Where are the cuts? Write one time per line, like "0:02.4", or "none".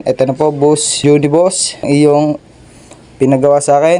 0:00.9
0:01.8

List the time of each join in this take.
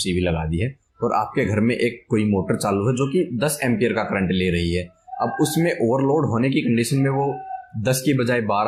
none

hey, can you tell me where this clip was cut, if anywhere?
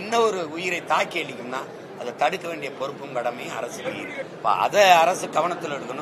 0:04.3

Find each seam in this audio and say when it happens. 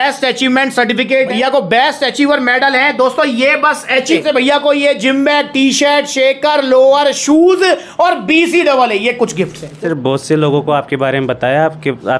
0:01.3
0:04.2
0:09.6

